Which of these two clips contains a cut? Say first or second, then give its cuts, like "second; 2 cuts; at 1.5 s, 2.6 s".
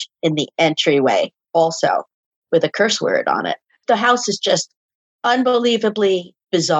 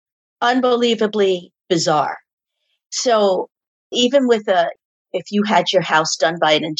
first; 1 cut; at 3.7 s